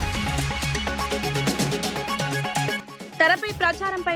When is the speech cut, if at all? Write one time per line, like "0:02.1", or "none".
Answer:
0:01.0
0:02.3